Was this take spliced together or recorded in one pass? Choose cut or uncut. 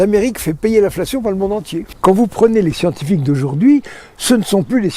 cut